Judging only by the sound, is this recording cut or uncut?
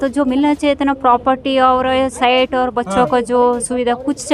uncut